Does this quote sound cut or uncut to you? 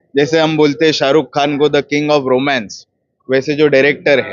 uncut